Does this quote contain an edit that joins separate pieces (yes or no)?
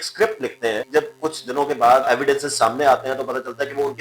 yes